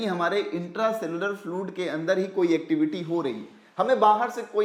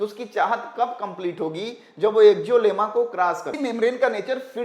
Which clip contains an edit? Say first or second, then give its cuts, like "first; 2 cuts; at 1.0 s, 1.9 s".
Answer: second; 1 cut; at 3.6 s